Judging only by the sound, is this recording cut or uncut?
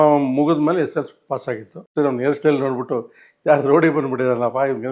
cut